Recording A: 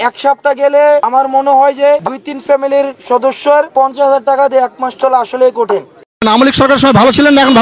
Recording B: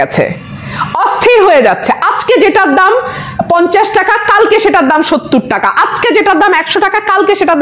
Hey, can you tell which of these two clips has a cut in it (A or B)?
A